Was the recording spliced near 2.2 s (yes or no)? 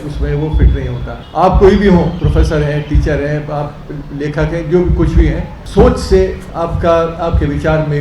yes